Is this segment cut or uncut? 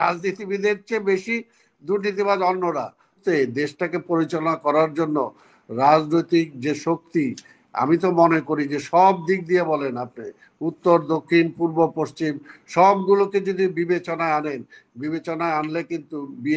cut